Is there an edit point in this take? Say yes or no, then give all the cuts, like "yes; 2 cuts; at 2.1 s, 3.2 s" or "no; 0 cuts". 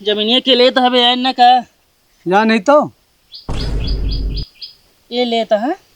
yes; 2 cuts; at 3.3 s, 4.6 s